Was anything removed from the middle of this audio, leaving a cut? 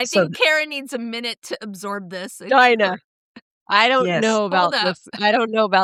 no; 0 cuts

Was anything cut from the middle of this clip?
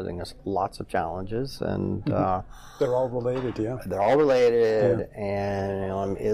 no; 0 cuts

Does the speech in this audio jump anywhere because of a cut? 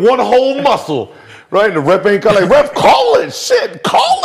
no; 0 cuts

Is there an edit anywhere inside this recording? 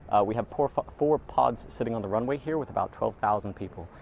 no; 0 cuts

